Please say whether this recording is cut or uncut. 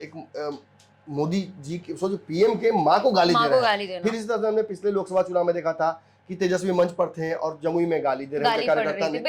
uncut